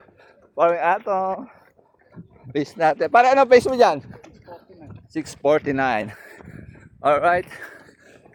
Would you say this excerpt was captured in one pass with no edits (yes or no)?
yes